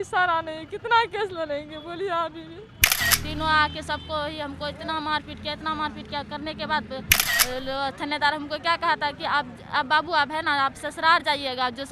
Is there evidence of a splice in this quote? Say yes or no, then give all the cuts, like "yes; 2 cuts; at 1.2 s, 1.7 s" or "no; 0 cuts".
yes; 2 cuts; at 3.0 s, 7.2 s